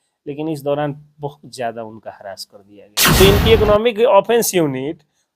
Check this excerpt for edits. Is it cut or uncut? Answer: cut